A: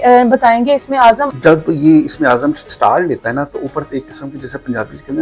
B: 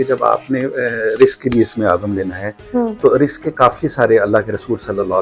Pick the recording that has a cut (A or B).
A